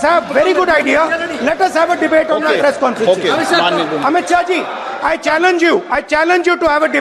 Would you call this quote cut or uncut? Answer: uncut